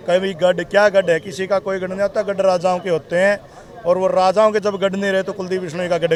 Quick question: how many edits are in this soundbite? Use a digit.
0